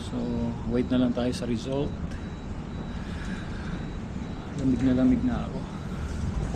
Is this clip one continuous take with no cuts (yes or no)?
yes